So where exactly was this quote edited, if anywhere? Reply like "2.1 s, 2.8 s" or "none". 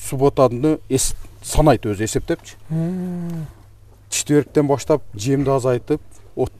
none